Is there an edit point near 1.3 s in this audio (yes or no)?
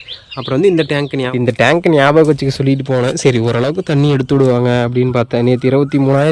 yes